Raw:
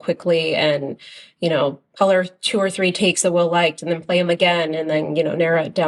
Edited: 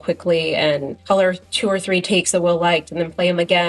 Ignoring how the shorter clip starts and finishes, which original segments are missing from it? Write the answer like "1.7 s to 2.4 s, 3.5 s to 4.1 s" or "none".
0.9 s to 1.8 s

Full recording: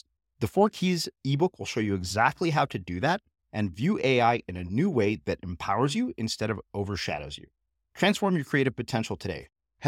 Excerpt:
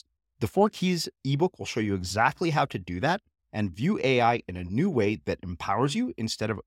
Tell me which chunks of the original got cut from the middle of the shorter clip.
none

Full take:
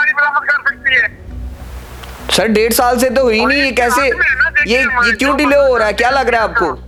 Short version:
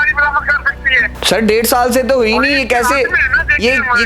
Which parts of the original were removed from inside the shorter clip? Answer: 1.1 s to 2.2 s

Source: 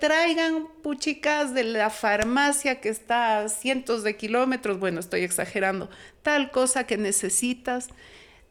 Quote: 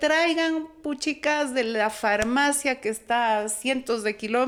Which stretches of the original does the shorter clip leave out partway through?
none

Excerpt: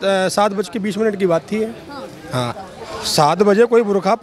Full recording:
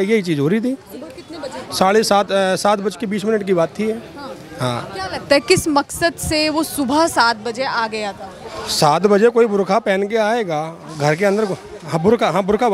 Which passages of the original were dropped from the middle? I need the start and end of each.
4.9 s to 8.2 s

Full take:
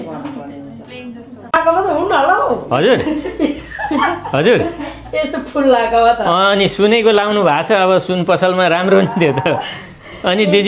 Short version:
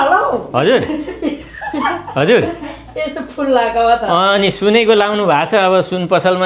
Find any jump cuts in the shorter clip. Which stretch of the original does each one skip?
none

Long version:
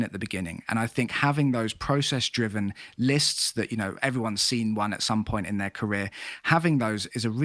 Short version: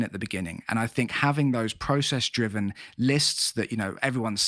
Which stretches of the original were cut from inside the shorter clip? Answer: none

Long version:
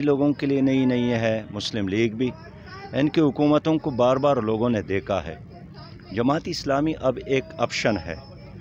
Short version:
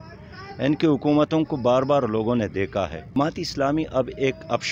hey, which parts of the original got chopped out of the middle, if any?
5.5 s to 6.2 s

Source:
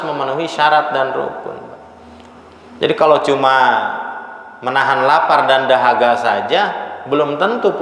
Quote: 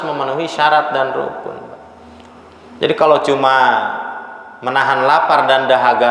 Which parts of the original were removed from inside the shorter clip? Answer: none

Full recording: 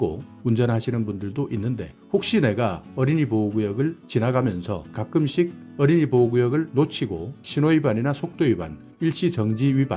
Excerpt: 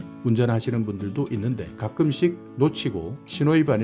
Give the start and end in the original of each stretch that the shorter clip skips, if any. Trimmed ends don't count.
1.9 s to 4.9 s, 5.7 s to 6.7 s

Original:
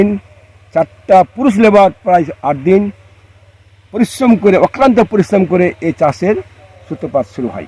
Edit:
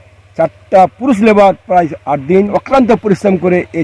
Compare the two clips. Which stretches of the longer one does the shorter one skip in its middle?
2.9 s to 4.6 s

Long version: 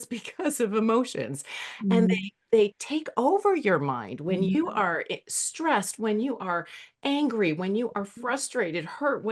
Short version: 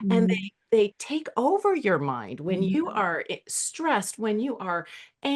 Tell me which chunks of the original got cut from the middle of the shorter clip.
none

